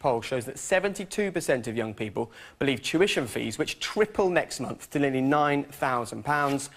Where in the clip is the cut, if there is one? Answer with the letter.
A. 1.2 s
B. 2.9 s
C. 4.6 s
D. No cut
C